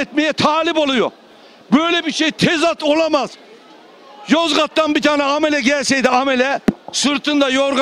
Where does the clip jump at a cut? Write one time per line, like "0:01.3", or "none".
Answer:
none

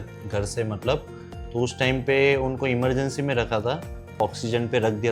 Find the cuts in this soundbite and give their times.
0:04.2

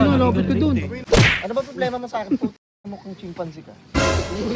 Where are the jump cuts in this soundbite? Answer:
0:00.9

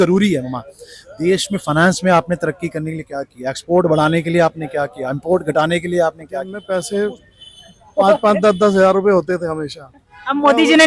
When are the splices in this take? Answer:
0:06.6

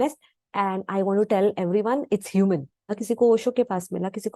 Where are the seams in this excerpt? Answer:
0:03.0

